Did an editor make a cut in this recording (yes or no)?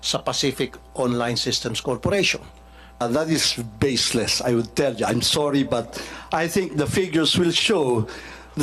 yes